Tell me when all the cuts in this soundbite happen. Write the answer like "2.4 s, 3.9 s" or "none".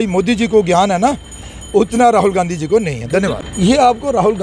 3.3 s